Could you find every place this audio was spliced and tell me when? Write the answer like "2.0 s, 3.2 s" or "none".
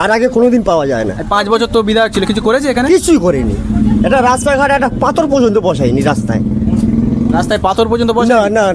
none

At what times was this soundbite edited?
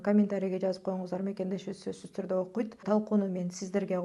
2.8 s

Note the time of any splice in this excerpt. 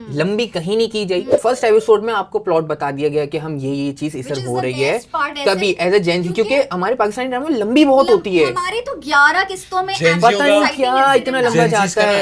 1.3 s

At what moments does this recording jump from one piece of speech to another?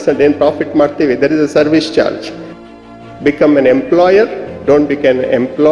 2.8 s

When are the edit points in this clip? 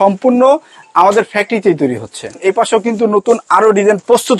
2.3 s

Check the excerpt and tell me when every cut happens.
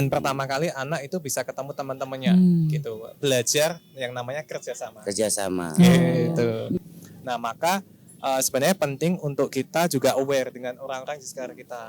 6.7 s

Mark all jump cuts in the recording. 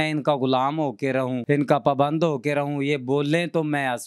1.4 s

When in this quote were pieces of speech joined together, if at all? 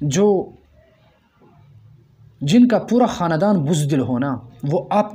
none

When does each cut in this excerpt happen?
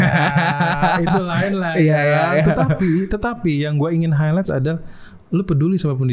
none

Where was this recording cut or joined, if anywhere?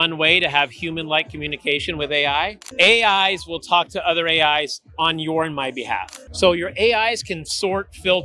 2.6 s, 6.2 s

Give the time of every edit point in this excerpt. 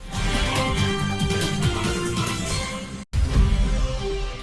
none

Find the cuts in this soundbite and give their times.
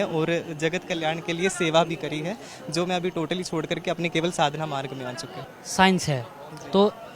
none

